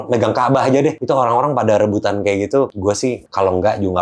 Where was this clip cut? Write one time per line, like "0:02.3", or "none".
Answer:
0:01.0
0:03.0